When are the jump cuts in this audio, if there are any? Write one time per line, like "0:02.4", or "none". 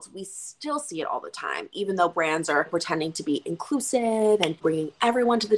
0:02.7
0:04.6